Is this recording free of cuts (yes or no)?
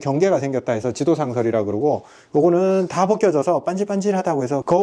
yes